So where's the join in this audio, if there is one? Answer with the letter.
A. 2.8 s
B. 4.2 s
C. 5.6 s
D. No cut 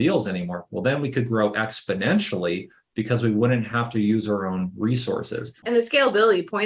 C